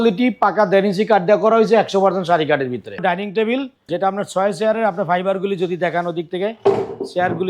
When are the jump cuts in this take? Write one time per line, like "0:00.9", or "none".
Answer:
0:03.0
0:03.8